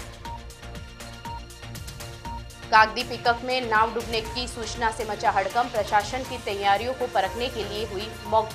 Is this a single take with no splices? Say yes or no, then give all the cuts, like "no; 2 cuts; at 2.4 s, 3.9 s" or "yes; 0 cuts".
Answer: yes; 0 cuts